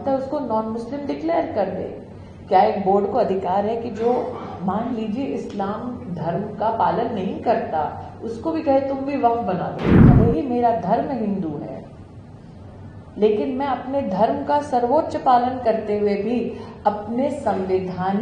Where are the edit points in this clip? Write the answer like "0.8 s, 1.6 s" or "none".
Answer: 9.9 s

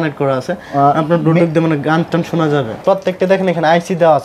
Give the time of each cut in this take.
2.8 s

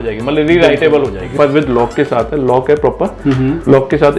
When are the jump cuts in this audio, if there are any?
1.3 s

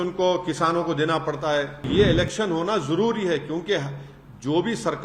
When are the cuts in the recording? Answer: 1.9 s

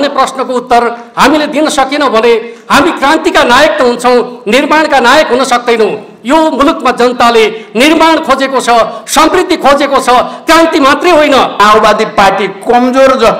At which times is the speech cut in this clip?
11.6 s

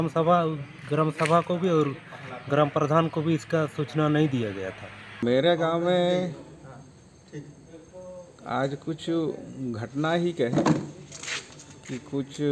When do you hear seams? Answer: 5.2 s

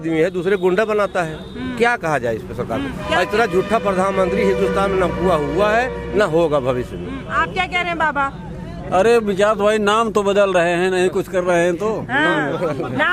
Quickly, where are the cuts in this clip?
none

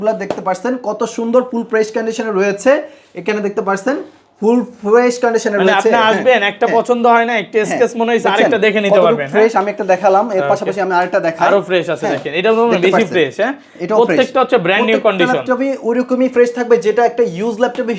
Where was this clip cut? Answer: none

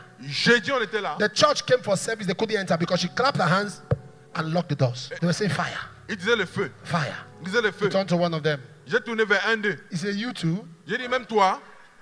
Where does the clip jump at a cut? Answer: 5.1 s

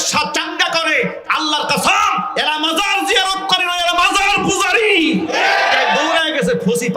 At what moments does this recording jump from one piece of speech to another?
6.0 s

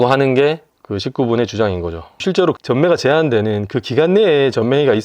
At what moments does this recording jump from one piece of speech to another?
2.2 s

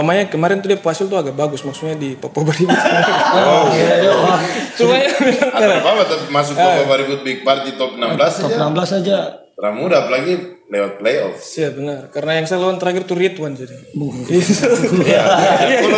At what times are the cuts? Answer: none

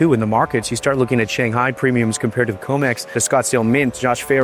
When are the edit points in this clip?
3.2 s

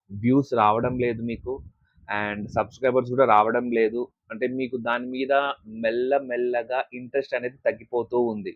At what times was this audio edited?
none

